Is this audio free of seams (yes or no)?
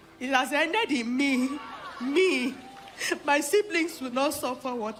yes